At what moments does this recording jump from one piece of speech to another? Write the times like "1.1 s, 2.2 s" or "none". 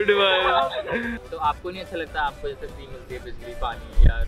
1.2 s